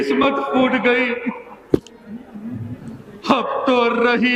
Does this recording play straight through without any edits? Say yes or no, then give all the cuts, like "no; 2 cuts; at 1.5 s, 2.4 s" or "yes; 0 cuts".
yes; 0 cuts